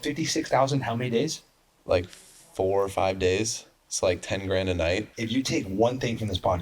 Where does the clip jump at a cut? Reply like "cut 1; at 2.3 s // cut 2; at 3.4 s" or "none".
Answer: cut 1; at 5.1 s